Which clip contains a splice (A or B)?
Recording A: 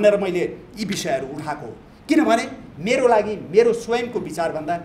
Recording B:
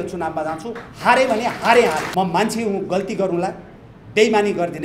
B